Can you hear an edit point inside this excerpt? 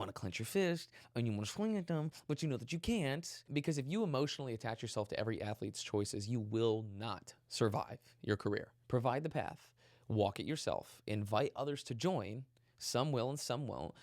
yes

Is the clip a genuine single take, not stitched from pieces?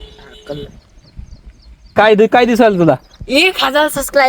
yes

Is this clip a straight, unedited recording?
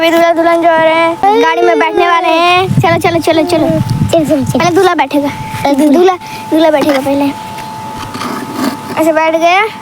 no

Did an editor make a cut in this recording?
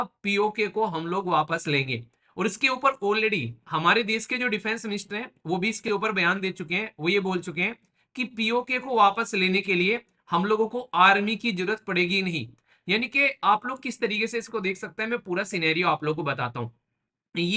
no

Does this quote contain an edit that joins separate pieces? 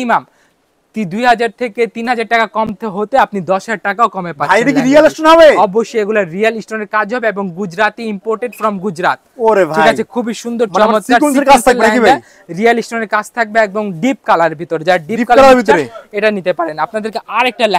no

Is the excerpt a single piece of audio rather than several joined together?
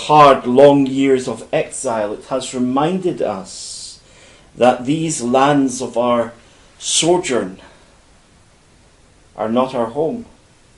yes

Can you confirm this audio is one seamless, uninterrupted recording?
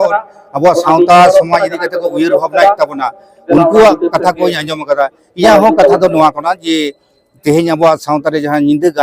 yes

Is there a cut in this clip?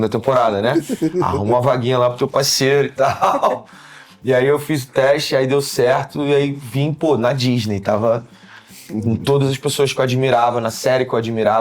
no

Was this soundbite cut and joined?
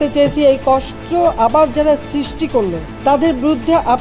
yes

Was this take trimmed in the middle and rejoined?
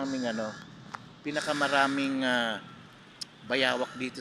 no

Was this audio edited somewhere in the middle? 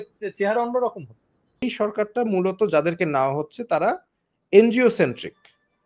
yes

